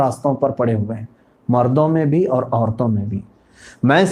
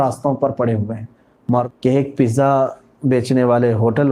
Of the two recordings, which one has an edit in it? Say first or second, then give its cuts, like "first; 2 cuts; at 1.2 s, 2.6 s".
second; 1 cut; at 1.4 s